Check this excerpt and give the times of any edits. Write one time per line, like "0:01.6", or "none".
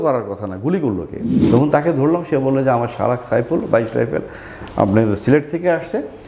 0:01.2